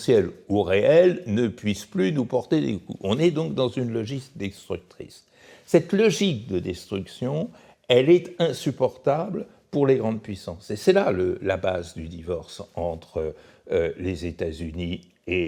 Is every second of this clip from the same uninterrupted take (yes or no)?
yes